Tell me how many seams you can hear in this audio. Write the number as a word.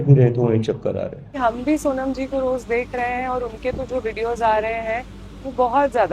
one